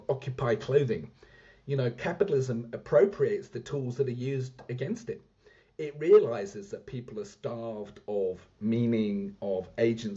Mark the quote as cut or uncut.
uncut